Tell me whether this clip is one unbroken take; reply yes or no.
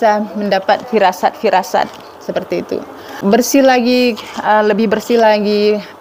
no